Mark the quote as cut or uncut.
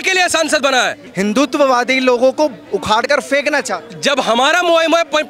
cut